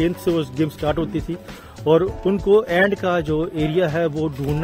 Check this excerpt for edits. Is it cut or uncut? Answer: uncut